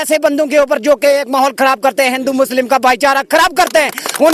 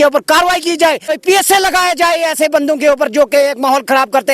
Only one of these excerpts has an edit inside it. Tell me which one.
second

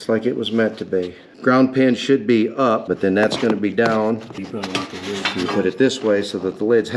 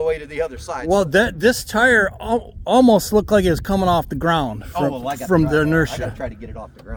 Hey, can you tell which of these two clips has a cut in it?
first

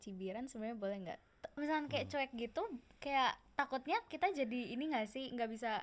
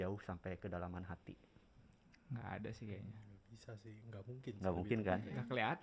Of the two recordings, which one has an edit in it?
first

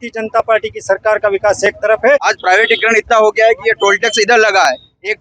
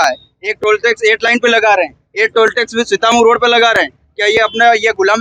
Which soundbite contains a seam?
first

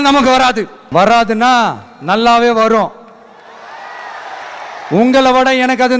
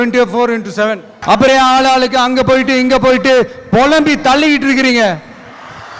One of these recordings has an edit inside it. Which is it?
second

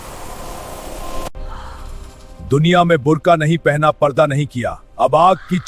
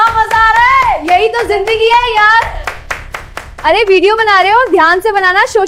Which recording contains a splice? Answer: first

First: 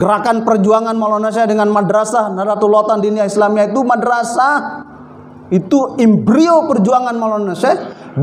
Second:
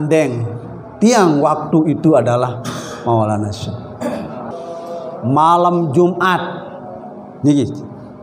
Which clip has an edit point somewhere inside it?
second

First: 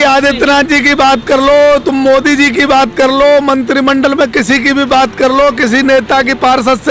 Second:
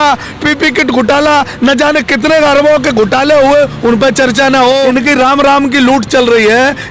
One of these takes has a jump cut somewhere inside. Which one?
second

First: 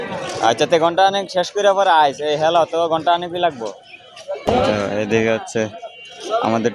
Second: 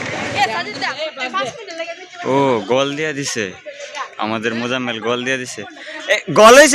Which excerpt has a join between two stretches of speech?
first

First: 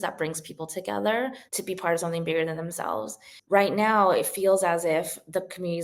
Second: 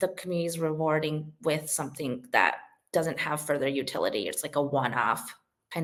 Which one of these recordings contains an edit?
first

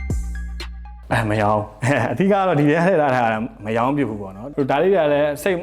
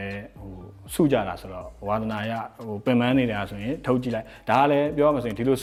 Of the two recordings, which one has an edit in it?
first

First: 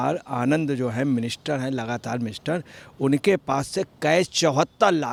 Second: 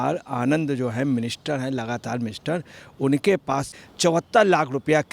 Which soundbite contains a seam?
second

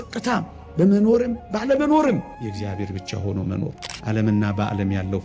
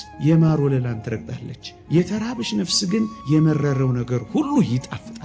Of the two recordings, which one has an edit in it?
first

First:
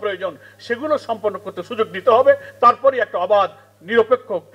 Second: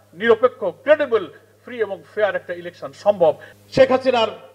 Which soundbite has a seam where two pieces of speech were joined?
second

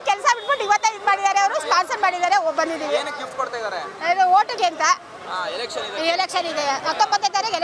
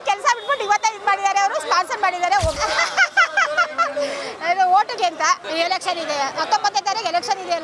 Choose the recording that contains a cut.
second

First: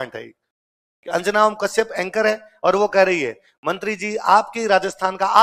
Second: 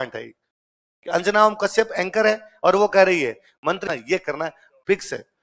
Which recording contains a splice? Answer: second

